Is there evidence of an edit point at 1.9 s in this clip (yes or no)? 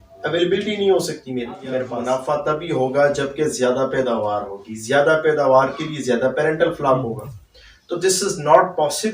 yes